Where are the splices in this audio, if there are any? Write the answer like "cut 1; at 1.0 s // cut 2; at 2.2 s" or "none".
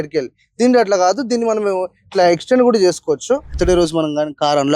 cut 1; at 3.6 s